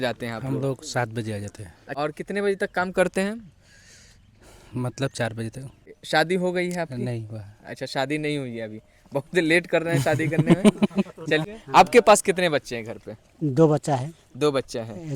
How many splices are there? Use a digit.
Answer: 3